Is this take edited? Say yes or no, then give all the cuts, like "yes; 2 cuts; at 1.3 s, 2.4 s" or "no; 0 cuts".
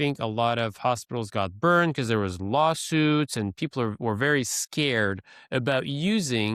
no; 0 cuts